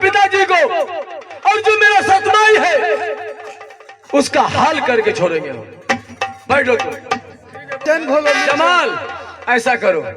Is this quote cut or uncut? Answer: cut